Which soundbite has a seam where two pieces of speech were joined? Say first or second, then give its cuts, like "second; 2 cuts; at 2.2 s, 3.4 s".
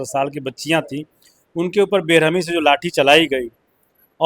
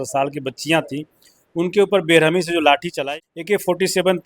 second; 1 cut; at 3.0 s